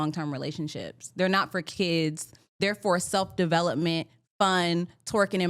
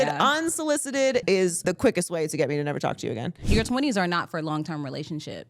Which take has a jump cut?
second; 2 cuts; at 1.3 s, 3.4 s

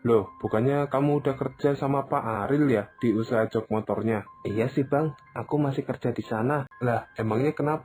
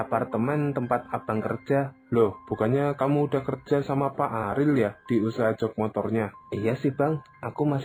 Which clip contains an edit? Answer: first; 1 cut; at 6.7 s

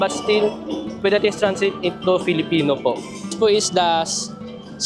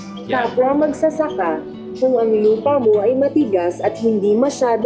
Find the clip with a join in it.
first; 1 cut; at 3.3 s

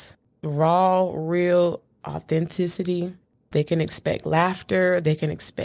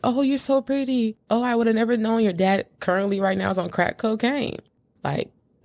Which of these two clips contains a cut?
second; 1 cut; at 1.0 s

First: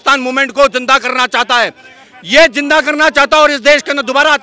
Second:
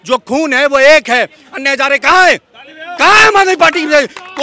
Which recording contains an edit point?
second; 1 cut; at 1.4 s

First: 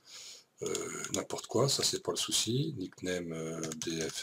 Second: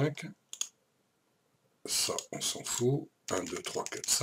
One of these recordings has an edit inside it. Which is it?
first; 1 cut; at 1.3 s

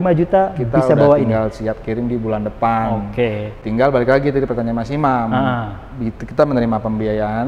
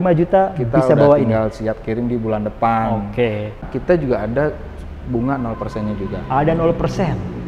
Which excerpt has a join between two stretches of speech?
second; 1 cut; at 3.6 s

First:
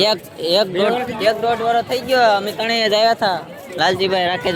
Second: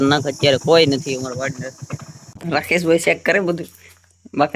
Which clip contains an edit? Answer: second; 1 cut; at 2.3 s

